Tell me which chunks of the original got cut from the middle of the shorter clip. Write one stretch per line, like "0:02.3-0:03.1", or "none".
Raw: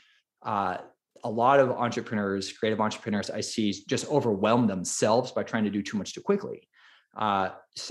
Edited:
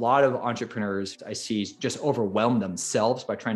0:02.5-0:03.3